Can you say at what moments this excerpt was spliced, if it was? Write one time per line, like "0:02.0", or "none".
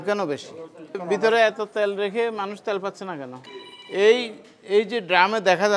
0:00.9
0:03.4